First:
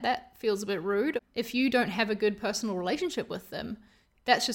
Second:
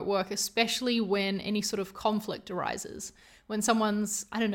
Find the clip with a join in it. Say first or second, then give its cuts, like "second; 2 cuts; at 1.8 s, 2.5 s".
first; 1 cut; at 1.2 s